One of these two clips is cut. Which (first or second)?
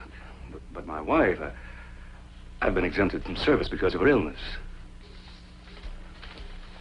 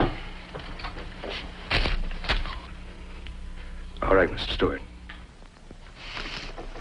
second